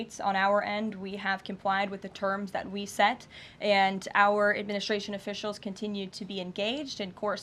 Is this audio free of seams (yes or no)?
yes